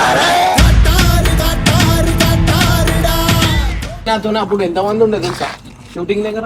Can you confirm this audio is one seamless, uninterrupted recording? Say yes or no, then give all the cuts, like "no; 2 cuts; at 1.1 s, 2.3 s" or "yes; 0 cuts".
no; 1 cut; at 4.1 s